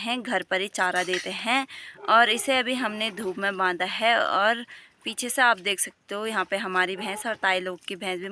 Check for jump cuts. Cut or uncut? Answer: uncut